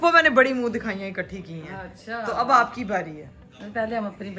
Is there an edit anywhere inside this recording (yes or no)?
no